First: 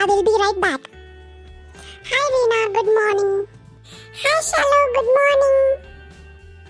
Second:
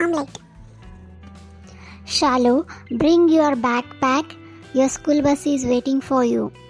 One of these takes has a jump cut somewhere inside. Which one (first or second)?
first